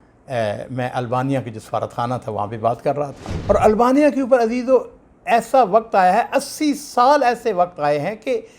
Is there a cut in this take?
yes; 1 cut; at 3.3 s

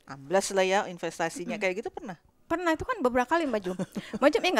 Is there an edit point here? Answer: no; 0 cuts

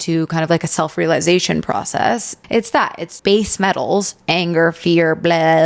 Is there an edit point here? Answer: yes; 1 cut; at 2.5 s

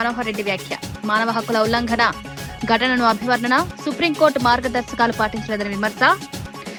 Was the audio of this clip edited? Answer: no; 0 cuts

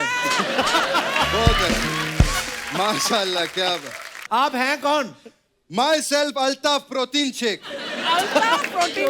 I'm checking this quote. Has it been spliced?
yes; 1 cut; at 4.2 s

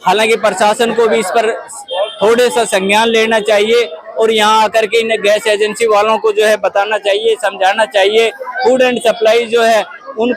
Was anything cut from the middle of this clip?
no; 0 cuts

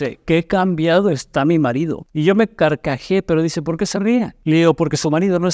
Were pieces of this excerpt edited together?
yes; 2 cuts; at 2.0 s, 4.4 s

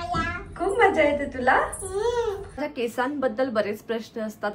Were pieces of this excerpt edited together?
yes; 1 cut; at 2.7 s

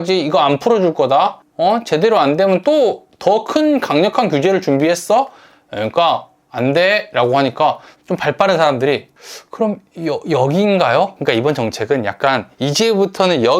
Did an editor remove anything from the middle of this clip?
yes; 1 cut; at 11.2 s

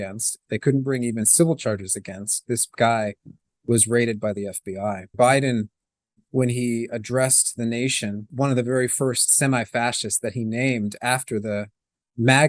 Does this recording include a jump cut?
yes; 2 cuts; at 5.1 s, 8.3 s

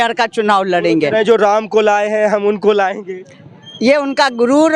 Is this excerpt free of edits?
yes; 0 cuts

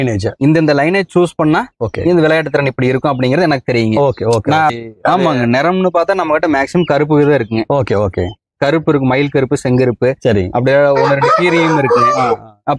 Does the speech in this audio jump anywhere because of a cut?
yes; 1 cut; at 4.7 s

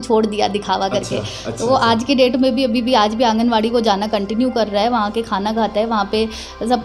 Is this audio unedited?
yes; 0 cuts

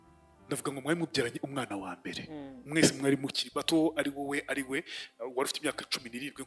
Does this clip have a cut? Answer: no; 0 cuts

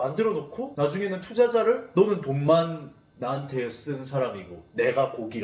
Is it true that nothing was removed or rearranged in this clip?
yes; 0 cuts

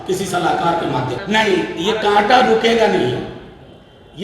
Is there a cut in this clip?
yes; 1 cut; at 1.2 s

